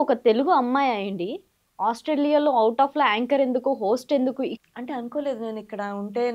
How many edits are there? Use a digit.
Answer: 1